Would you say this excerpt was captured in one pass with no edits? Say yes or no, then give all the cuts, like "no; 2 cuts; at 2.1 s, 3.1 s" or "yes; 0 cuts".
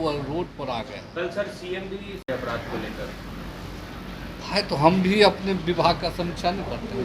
yes; 0 cuts